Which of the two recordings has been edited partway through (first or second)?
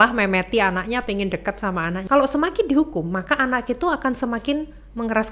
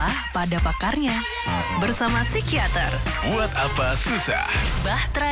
first